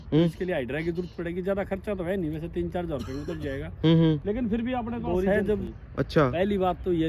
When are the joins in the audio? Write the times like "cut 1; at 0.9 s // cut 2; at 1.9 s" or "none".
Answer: cut 1; at 5.7 s